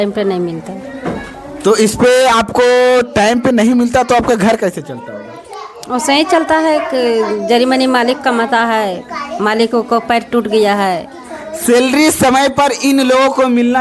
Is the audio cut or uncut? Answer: uncut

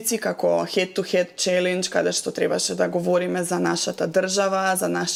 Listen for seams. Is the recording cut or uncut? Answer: uncut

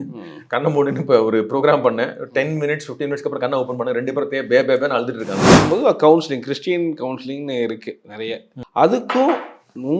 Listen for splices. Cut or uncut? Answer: cut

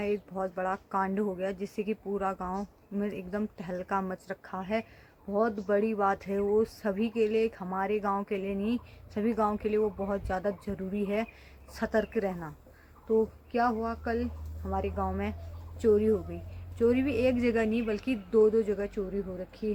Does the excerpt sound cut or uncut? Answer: uncut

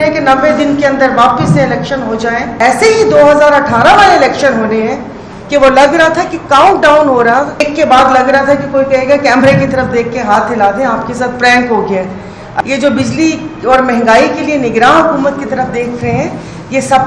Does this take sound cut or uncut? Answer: cut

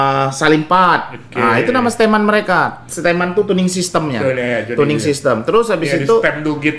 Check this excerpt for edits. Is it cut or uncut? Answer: uncut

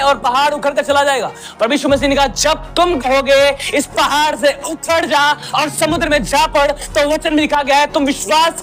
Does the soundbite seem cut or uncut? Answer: uncut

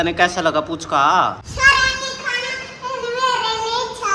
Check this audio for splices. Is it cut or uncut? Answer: cut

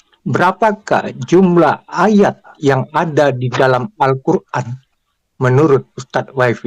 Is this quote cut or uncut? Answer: uncut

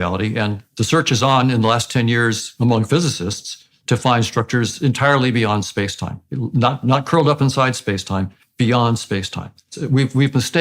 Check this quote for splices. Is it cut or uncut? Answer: cut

